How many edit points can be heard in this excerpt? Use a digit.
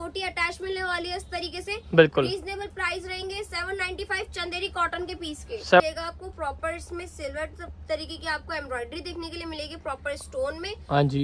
1